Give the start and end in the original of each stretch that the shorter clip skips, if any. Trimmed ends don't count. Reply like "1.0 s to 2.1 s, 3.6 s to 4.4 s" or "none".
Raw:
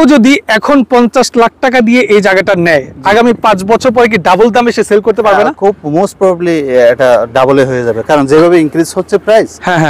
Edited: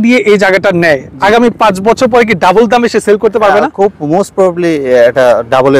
none